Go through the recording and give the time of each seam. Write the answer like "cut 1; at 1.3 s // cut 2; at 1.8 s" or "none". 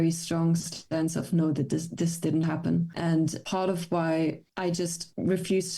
cut 1; at 3.4 s